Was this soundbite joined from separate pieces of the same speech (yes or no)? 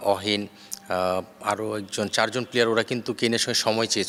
no